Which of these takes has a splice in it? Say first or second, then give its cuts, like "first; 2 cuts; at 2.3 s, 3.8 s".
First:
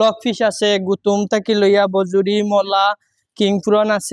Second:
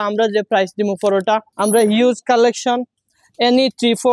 second; 1 cut; at 1.5 s